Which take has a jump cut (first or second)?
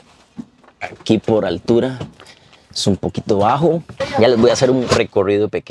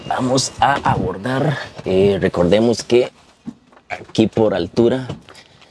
first